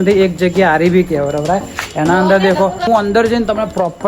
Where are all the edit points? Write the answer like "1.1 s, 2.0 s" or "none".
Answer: 2.9 s